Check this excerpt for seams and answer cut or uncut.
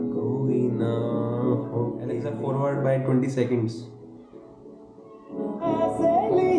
cut